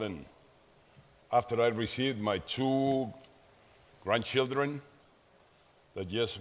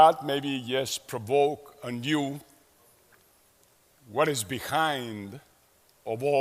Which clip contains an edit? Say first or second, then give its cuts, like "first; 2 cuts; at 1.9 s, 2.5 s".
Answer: second; 1 cut; at 2.1 s